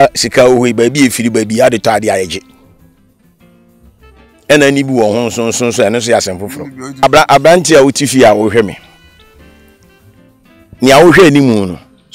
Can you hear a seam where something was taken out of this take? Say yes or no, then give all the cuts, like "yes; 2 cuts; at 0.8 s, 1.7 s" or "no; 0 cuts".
yes; 1 cut; at 7.0 s